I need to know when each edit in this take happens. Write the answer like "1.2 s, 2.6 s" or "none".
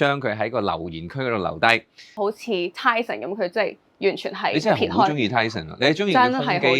2.2 s